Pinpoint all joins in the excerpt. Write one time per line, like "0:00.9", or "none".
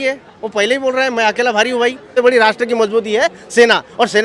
0:02.2